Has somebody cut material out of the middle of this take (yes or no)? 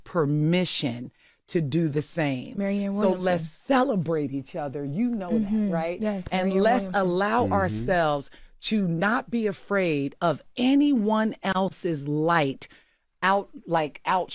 no